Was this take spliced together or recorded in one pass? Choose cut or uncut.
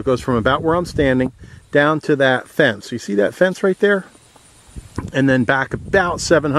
uncut